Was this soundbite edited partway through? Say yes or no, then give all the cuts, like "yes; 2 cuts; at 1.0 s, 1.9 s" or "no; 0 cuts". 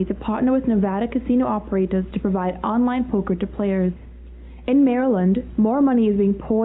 yes; 1 cut; at 5.6 s